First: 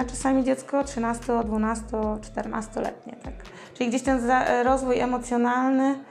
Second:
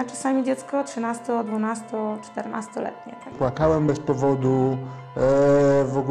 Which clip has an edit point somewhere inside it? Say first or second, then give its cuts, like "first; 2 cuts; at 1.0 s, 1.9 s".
second; 1 cut; at 3.4 s